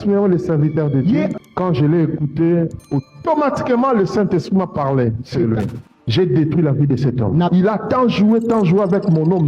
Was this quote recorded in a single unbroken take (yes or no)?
no